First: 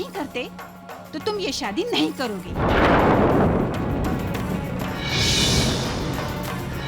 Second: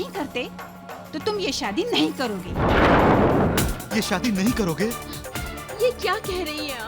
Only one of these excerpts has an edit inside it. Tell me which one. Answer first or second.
second